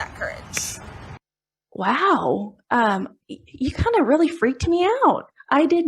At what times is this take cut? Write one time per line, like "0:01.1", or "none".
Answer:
0:01.1